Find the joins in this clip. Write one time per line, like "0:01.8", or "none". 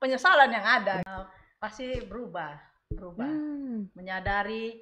0:01.0